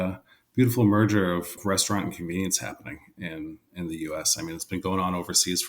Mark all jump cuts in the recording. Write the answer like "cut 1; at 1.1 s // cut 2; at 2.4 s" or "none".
cut 1; at 1.6 s